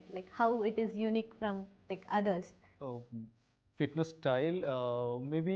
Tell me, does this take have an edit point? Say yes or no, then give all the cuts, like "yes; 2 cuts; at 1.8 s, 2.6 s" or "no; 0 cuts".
yes; 1 cut; at 2.6 s